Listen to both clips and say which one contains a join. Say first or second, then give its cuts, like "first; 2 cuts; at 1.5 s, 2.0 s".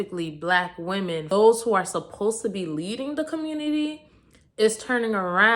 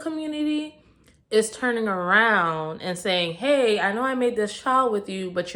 first; 1 cut; at 1.2 s